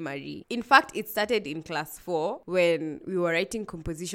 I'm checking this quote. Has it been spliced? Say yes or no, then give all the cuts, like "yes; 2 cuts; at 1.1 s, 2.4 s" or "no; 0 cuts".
no; 0 cuts